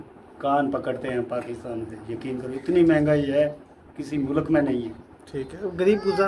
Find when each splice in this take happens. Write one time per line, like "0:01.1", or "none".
none